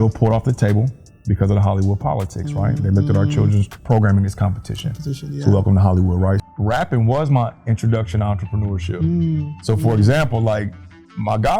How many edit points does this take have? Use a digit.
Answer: 2